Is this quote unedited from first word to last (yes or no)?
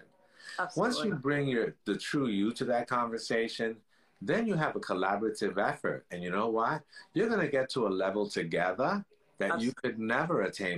yes